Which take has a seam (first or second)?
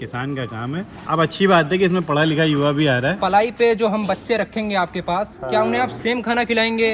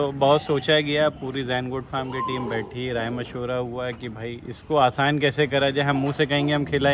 first